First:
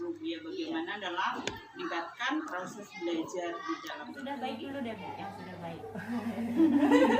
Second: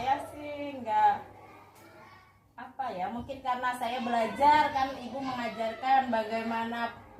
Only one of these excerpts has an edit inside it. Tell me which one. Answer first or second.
first